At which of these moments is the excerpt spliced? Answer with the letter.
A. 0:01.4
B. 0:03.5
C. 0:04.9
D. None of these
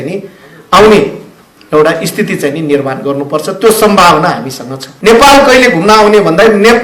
C